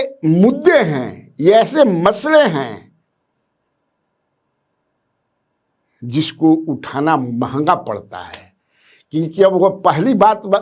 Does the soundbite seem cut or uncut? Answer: uncut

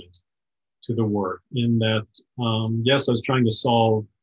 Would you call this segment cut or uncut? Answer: uncut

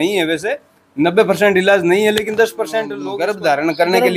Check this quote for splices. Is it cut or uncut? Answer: cut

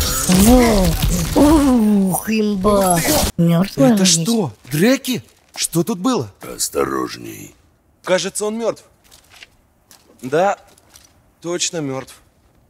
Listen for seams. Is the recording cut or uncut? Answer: cut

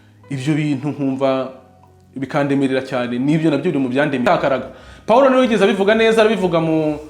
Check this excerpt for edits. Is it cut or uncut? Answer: cut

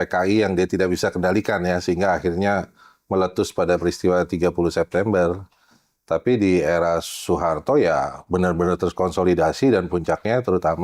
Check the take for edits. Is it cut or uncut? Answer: uncut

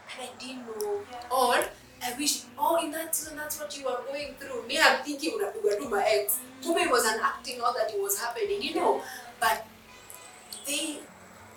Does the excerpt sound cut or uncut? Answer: uncut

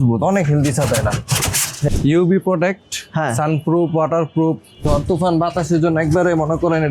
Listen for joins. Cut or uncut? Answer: cut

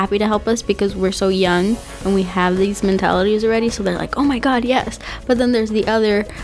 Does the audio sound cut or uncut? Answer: uncut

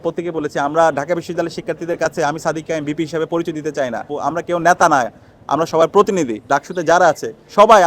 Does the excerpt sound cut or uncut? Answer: cut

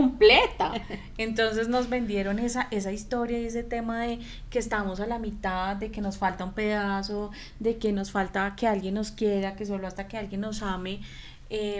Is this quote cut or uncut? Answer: uncut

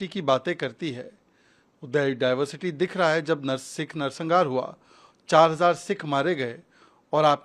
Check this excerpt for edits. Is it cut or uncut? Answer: uncut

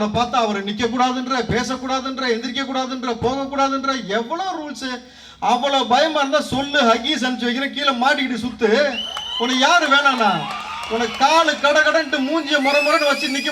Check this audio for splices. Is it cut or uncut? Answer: uncut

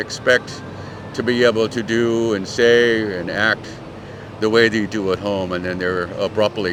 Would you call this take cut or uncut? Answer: uncut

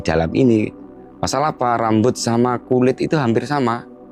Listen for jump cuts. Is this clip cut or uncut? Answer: uncut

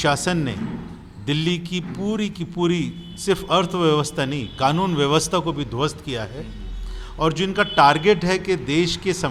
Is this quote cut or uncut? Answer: uncut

